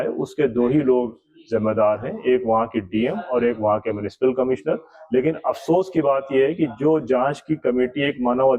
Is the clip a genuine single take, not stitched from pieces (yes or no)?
yes